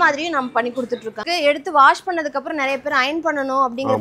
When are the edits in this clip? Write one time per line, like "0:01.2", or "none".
0:01.3